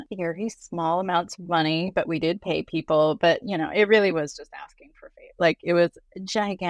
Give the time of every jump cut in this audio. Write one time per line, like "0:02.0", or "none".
none